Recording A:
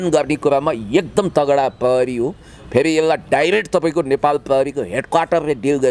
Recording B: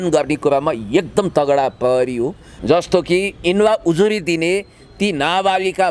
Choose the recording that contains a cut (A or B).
B